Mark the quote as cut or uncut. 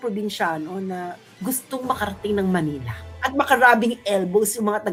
uncut